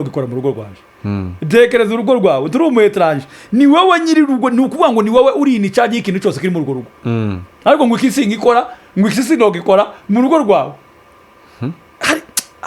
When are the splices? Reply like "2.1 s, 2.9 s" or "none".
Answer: none